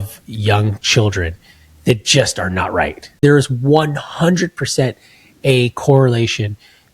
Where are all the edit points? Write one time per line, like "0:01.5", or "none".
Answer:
0:03.2